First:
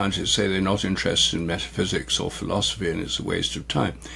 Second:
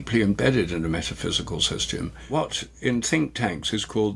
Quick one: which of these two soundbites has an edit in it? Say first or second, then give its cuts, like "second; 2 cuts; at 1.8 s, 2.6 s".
second; 1 cut; at 2.2 s